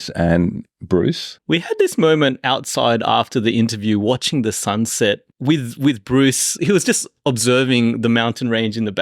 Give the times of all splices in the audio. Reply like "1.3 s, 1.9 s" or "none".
1.3 s, 5.3 s, 6.5 s